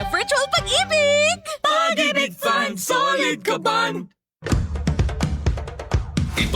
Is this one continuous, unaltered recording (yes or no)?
no